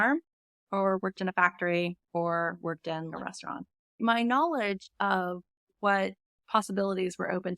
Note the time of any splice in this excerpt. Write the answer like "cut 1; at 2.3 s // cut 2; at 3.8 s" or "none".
cut 1; at 4.0 s